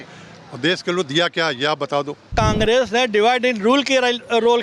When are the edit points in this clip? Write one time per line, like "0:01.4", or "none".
0:02.3